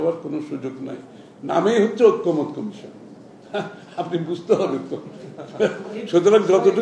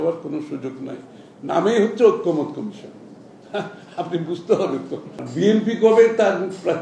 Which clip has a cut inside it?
second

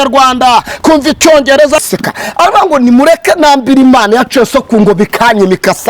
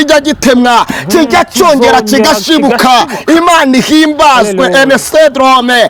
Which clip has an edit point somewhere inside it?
first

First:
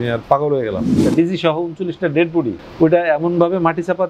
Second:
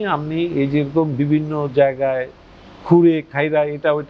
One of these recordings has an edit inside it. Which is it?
first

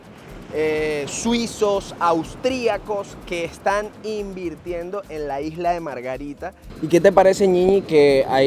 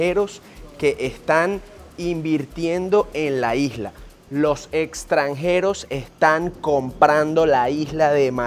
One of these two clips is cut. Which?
first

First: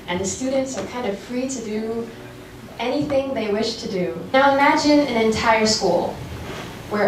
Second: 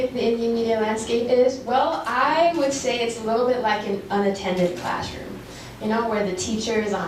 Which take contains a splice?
first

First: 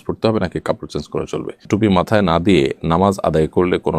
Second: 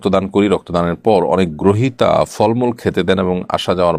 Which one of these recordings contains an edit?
first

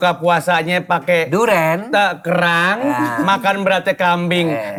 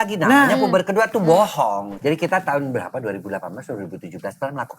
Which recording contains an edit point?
second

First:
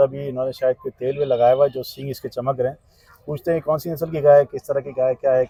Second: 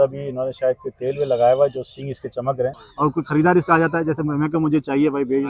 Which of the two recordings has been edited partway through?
second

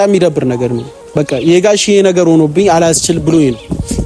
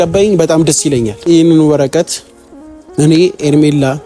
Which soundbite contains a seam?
second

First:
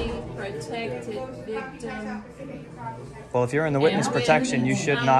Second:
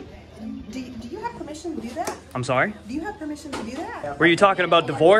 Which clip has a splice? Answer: second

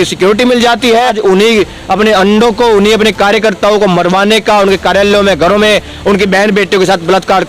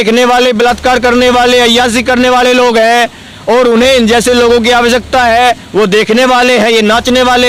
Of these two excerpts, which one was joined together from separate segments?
first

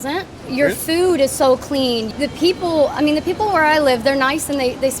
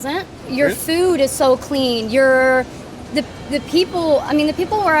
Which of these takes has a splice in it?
first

